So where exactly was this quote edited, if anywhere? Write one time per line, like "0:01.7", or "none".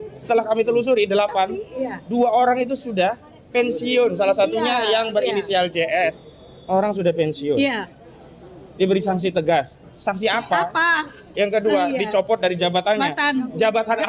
0:06.2